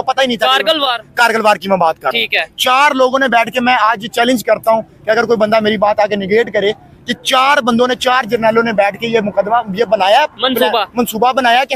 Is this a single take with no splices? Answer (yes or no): yes